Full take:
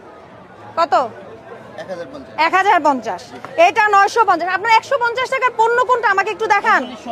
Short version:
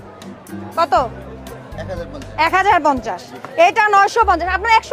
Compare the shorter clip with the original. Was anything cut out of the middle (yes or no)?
no